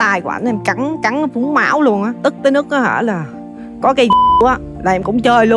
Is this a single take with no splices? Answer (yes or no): yes